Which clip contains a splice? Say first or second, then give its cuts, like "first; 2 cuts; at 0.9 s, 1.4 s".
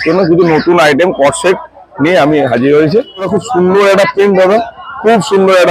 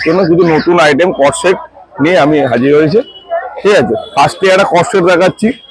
first; 1 cut; at 3.3 s